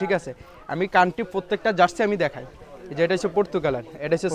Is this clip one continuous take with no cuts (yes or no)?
yes